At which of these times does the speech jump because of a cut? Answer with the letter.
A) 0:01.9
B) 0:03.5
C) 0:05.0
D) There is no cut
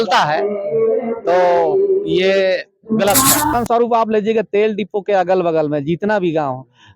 B